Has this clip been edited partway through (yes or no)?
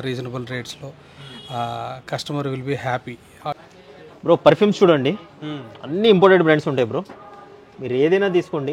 yes